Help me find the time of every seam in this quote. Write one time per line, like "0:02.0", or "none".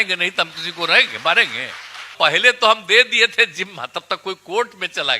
0:02.1